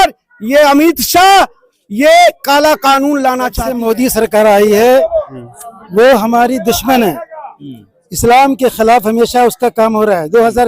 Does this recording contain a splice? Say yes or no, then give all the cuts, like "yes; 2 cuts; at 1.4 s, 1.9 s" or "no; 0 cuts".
yes; 1 cut; at 3.7 s